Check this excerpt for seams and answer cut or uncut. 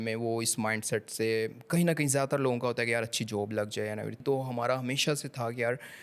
cut